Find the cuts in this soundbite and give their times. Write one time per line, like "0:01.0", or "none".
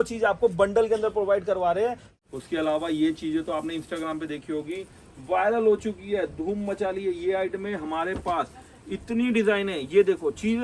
0:02.1